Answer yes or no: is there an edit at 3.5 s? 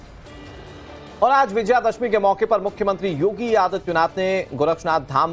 no